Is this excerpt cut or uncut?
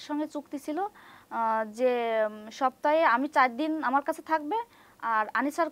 uncut